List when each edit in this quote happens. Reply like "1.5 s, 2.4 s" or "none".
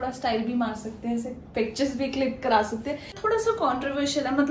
3.2 s